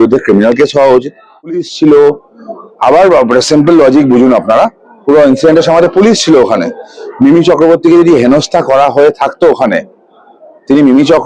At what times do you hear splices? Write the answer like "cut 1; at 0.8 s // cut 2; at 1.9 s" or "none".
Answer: cut 1; at 1.6 s